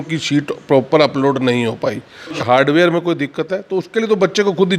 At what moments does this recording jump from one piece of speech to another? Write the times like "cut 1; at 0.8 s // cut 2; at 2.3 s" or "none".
cut 1; at 2.4 s